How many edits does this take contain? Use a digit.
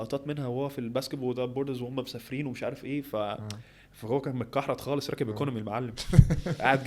0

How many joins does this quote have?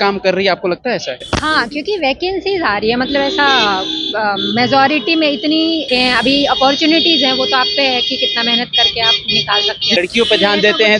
3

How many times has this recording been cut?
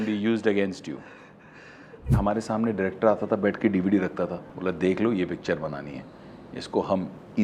2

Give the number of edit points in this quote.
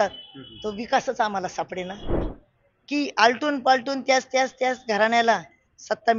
1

